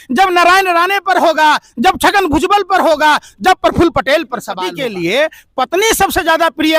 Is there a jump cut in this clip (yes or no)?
yes